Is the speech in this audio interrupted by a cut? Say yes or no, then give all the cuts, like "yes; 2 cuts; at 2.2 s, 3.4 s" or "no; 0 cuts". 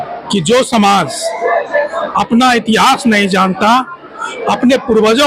no; 0 cuts